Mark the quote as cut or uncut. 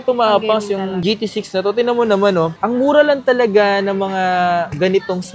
cut